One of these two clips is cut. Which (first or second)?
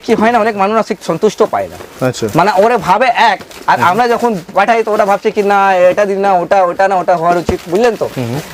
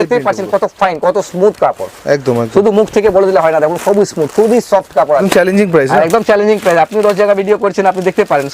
second